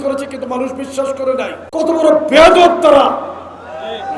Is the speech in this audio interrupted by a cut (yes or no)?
yes